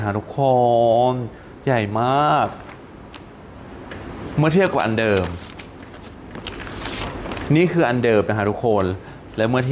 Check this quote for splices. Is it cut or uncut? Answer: uncut